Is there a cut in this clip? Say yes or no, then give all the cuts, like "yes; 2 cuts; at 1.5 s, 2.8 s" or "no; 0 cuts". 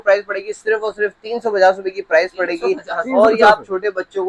no; 0 cuts